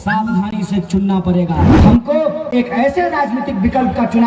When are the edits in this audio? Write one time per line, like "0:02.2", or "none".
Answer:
0:01.7